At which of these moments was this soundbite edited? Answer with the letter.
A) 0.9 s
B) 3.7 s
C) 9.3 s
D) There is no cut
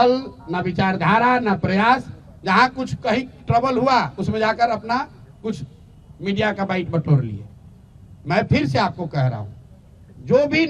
D